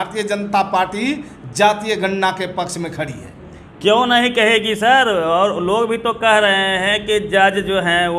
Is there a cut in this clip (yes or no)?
no